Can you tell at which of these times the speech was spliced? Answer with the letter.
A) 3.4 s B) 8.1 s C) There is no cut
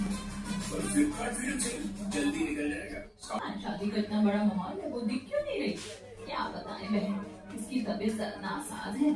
A